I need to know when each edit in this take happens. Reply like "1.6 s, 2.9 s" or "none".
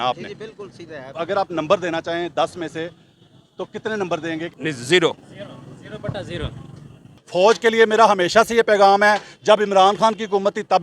1.1 s, 4.5 s, 7.2 s

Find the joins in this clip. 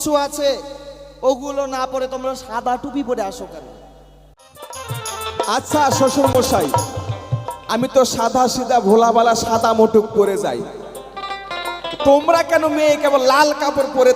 4.5 s

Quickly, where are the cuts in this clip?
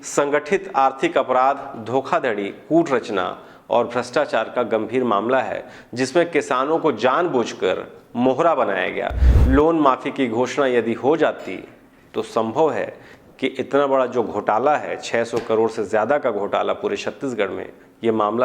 9.2 s

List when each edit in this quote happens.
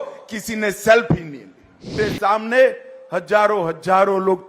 2.0 s

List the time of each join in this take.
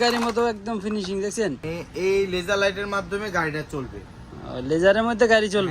1.7 s

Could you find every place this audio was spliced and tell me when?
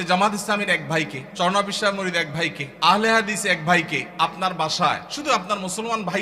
1.2 s, 2.6 s, 4.1 s, 5.1 s

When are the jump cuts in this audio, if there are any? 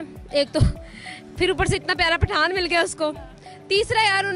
none

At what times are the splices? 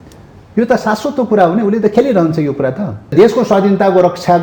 3.1 s

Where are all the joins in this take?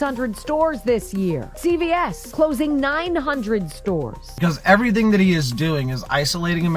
1.5 s, 2.2 s, 4.2 s

